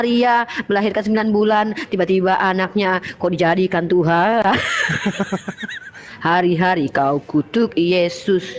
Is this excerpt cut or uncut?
cut